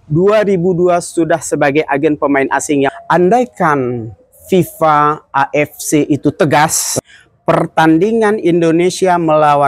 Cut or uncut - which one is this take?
cut